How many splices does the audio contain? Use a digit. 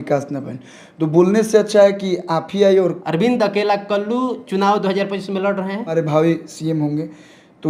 2